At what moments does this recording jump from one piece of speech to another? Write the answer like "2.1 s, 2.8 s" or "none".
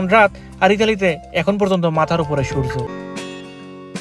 2.9 s